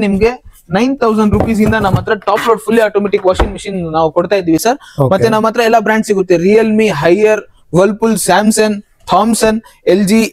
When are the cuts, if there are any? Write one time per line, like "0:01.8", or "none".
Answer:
none

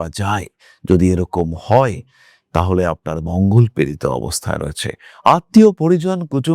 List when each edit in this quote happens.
none

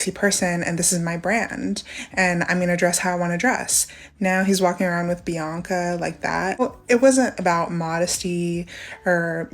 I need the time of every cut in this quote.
0:06.6

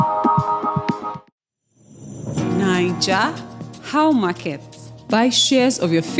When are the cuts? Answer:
0:01.3

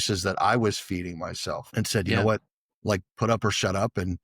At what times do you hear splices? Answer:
0:01.7

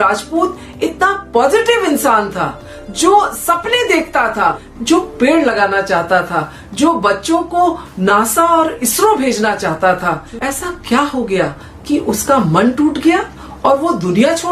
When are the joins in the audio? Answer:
0:04.7

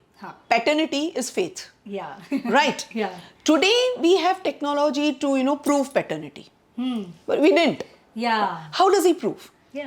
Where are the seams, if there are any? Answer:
none

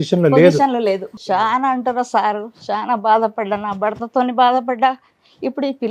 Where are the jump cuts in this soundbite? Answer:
0:01.1

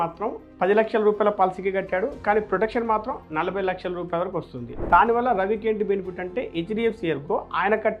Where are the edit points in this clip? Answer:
0:04.8

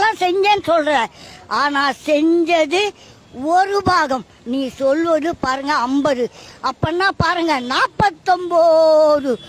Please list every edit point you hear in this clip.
none

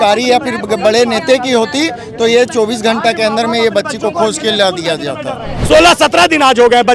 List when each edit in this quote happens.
0:05.5

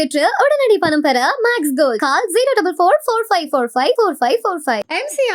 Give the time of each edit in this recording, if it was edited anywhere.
none

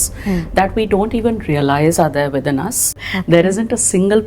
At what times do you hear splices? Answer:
0:03.1

